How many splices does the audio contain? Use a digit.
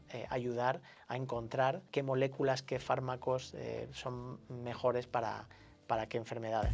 1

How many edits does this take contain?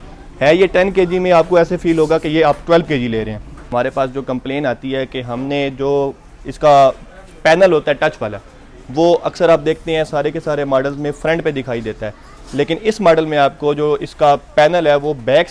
1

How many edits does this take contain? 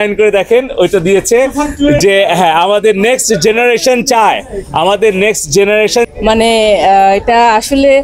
1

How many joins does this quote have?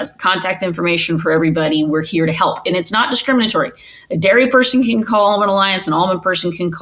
0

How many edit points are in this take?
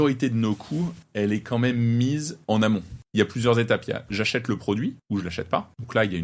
4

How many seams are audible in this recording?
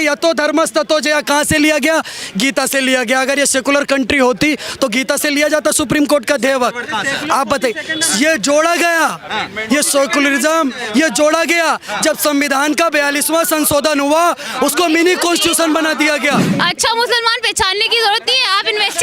1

